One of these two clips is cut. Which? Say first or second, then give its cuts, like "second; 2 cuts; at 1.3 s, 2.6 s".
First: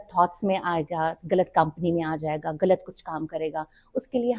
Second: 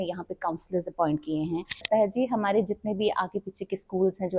second; 1 cut; at 1.9 s